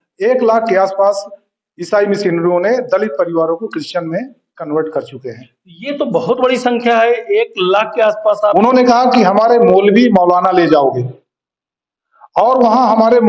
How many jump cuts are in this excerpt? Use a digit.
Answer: 1